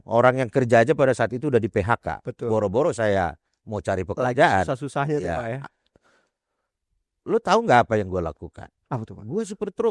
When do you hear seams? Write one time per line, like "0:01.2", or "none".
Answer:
none